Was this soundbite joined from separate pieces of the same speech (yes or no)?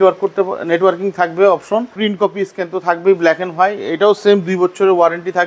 yes